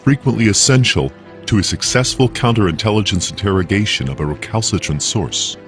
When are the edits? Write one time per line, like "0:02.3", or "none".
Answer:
none